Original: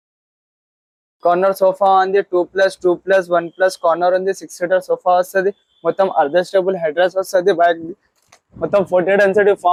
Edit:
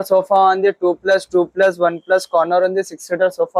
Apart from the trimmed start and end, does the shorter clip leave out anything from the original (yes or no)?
no